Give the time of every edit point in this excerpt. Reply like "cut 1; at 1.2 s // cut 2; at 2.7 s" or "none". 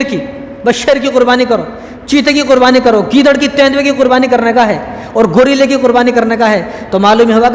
none